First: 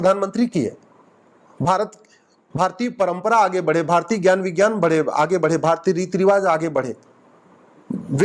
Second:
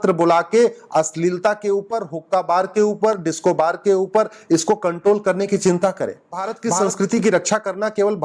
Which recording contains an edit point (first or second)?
second